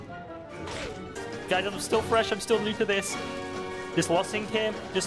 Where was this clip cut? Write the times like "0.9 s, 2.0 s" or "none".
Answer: 1.3 s